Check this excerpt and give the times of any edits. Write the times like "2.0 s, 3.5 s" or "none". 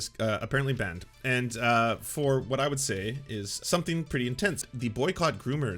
3.5 s, 4.7 s